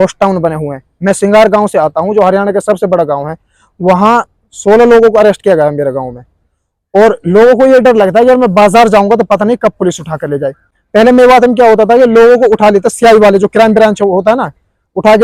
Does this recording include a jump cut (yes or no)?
no